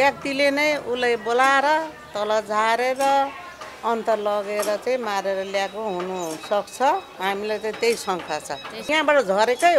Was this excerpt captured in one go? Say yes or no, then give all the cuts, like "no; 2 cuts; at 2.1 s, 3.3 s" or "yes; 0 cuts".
no; 1 cut; at 8.9 s